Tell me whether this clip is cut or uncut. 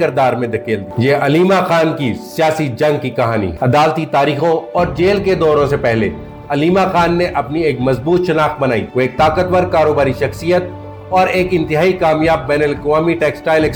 uncut